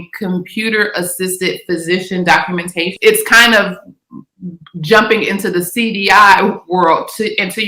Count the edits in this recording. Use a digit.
1